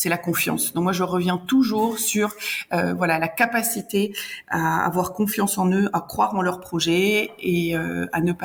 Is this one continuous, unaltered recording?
yes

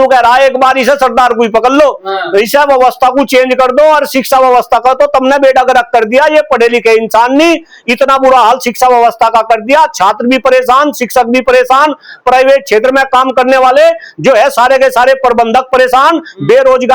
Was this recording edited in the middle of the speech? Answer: no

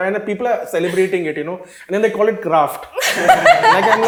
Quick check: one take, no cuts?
yes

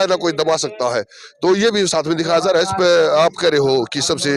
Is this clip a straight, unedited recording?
yes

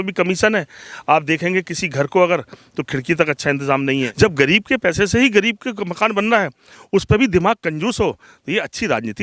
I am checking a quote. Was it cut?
yes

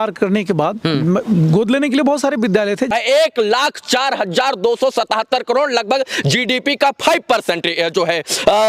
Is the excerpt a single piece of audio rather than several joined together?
no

